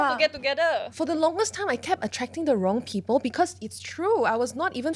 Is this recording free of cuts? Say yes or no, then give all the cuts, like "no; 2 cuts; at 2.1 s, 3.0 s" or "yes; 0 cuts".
no; 1 cut; at 0.9 s